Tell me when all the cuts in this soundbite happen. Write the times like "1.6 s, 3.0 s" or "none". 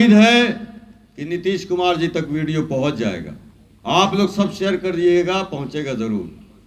none